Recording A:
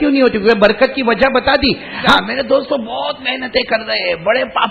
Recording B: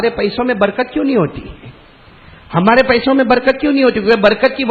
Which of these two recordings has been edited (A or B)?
A